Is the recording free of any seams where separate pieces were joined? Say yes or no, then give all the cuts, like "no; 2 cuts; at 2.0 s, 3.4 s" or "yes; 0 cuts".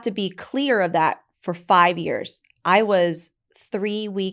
yes; 0 cuts